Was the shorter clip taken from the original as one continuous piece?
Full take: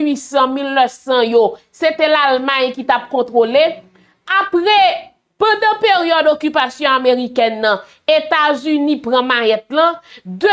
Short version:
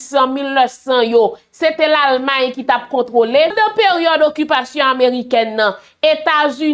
no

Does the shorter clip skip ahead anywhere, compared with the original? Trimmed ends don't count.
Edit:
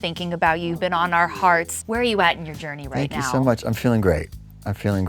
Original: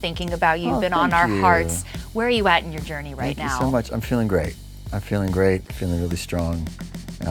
yes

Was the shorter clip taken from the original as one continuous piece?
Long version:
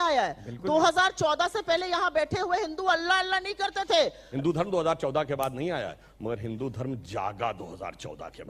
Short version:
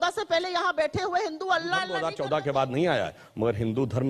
no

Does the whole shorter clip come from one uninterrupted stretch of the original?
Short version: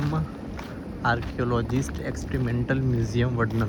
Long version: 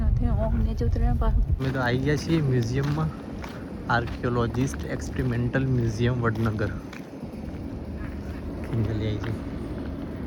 yes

